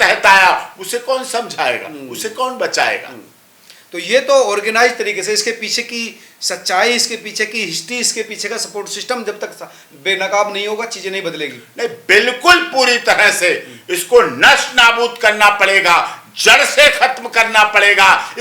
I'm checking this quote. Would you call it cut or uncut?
uncut